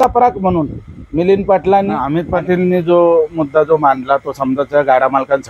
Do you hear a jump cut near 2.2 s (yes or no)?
yes